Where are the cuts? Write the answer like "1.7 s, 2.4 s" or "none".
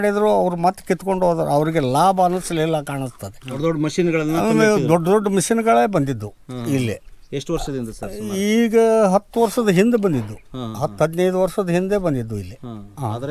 none

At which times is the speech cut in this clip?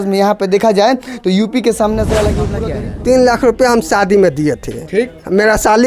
2.5 s

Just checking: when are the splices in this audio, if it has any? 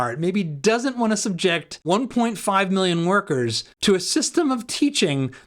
1.7 s, 3.7 s

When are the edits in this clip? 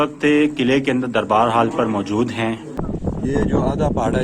2.7 s

